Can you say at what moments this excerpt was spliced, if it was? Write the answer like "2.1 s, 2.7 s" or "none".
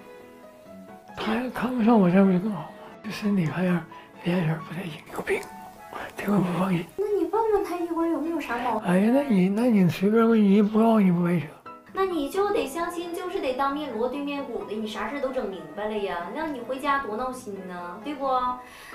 2.9 s